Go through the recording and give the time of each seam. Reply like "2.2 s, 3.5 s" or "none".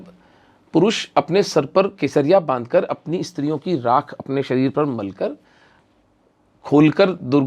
none